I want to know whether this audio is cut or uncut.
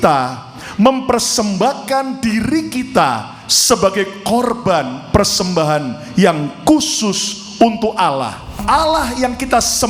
cut